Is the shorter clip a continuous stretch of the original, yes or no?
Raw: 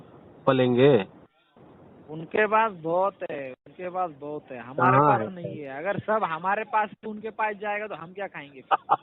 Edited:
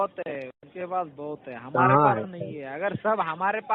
yes